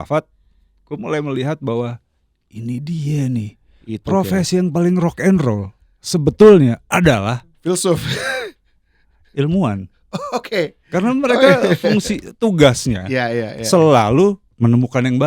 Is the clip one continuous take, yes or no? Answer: yes